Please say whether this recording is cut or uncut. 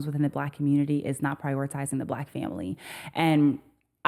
uncut